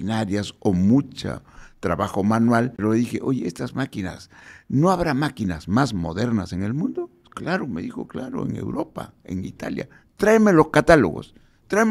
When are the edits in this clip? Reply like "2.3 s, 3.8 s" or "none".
2.8 s